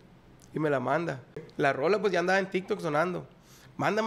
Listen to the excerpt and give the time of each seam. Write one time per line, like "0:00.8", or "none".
0:01.4